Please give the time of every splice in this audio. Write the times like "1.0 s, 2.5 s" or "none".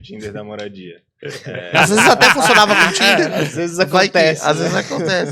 none